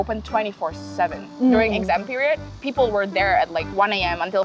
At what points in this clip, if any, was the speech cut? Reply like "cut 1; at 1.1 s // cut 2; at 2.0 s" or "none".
cut 1; at 2.6 s

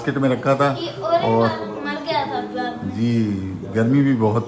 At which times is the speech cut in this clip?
none

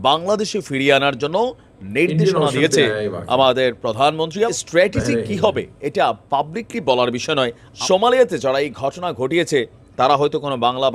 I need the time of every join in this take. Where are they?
cut 1; at 4.6 s // cut 2; at 7.7 s

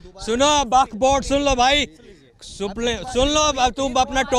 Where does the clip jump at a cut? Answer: none

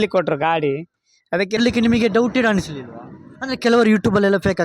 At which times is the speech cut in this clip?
cut 1; at 1.6 s

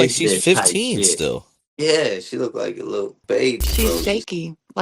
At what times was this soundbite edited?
cut 1; at 3.7 s

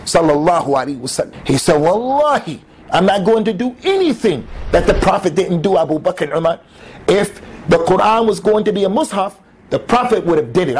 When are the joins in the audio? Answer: cut 1; at 1.3 s

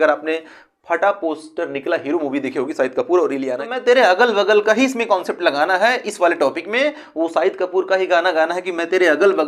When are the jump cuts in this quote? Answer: cut 1; at 3.6 s

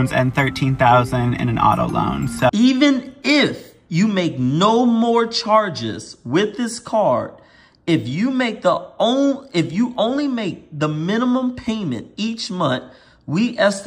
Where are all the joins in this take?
cut 1; at 2.5 s

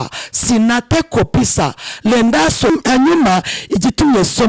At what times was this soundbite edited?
cut 1; at 2.7 s

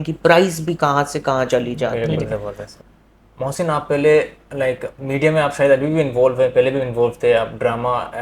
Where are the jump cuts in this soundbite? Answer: cut 1; at 2.7 s

